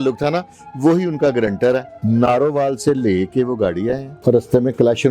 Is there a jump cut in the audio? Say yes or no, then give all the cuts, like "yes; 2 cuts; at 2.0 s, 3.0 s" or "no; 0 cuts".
yes; 2 cuts; at 1.9 s, 4.1 s